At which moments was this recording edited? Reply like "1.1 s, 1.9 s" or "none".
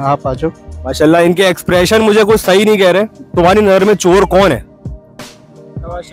3.2 s